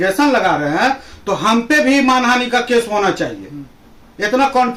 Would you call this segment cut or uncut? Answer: uncut